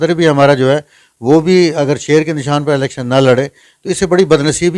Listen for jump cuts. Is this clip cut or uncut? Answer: uncut